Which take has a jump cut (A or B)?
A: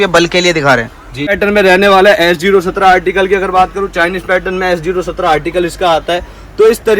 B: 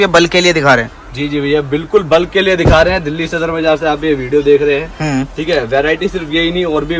A